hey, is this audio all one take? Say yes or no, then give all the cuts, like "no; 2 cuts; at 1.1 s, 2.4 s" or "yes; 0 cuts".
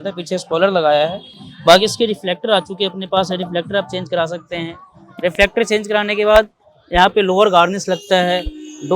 yes; 0 cuts